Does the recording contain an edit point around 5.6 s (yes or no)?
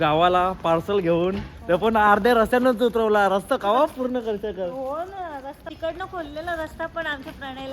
yes